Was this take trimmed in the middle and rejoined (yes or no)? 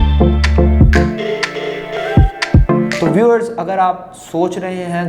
yes